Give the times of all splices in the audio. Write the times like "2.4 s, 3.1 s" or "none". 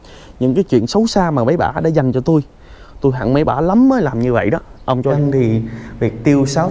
5.1 s